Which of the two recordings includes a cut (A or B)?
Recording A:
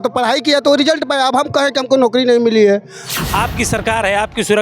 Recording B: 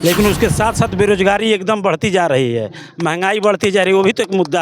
A